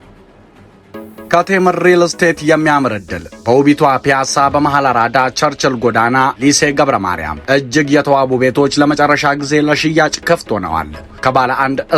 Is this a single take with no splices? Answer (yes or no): no